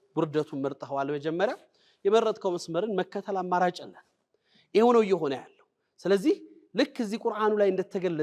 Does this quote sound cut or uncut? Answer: uncut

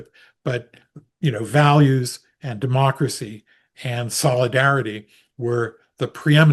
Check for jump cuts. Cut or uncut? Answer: uncut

